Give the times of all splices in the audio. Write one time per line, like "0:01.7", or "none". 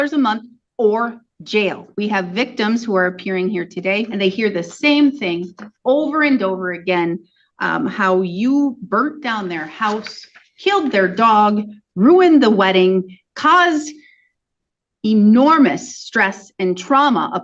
0:01.9
0:04.1